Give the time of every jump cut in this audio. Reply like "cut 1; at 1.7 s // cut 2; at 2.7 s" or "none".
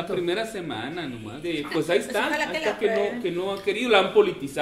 cut 1; at 1.4 s